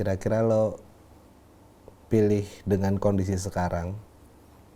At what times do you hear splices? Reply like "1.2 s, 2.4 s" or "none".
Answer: none